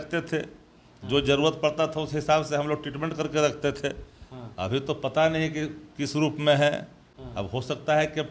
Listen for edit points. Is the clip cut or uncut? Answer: uncut